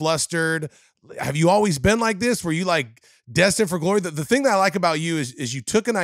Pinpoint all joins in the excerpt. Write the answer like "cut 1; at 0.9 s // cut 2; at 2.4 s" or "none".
none